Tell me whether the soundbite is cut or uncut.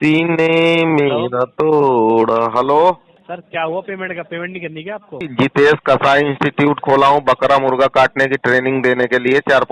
cut